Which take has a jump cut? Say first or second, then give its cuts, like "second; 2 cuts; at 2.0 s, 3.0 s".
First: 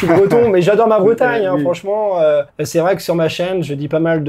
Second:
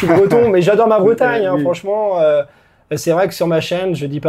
first; 1 cut; at 2.6 s